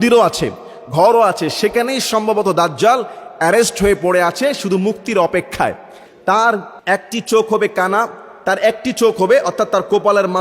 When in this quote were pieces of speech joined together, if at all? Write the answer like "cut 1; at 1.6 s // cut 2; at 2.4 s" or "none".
cut 1; at 6.1 s // cut 2; at 6.7 s